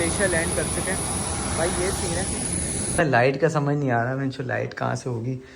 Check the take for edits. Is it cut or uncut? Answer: cut